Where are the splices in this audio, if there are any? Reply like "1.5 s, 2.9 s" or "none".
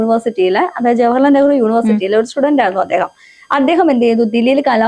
none